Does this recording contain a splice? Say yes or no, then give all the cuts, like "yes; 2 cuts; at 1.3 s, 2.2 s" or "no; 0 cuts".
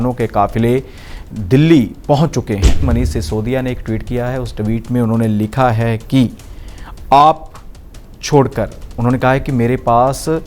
yes; 1 cut; at 2.9 s